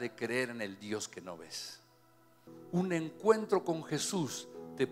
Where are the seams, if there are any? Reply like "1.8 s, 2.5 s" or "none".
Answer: 2.5 s